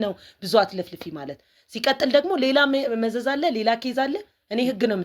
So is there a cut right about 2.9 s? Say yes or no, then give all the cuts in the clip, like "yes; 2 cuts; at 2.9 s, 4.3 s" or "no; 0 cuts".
no; 0 cuts